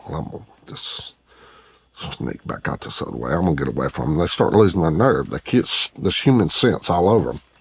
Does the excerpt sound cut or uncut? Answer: uncut